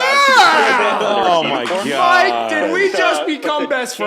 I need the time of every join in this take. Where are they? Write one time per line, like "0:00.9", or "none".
none